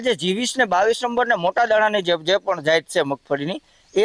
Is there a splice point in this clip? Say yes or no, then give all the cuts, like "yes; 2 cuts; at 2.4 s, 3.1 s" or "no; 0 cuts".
no; 0 cuts